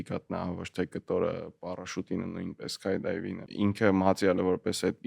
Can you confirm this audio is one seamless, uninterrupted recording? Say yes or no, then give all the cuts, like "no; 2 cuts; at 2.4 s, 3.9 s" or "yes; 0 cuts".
no; 1 cut; at 3.5 s